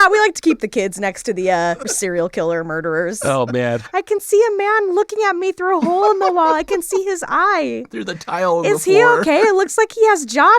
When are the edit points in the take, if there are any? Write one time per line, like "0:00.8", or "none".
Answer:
0:01.8
0:03.7